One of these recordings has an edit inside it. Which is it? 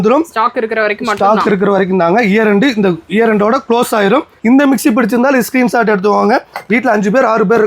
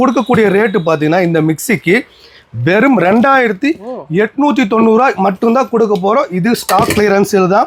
first; 1 cut; at 4.3 s

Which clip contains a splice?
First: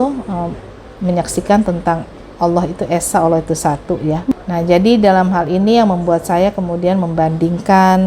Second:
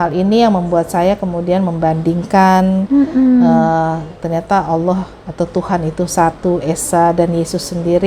first; 1 cut; at 4.3 s

